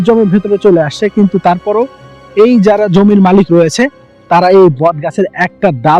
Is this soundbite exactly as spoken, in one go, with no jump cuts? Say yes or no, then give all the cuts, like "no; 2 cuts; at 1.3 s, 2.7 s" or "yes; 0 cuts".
yes; 0 cuts